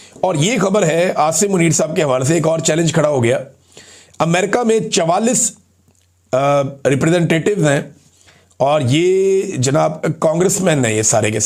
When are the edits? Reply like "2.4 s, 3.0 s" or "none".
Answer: none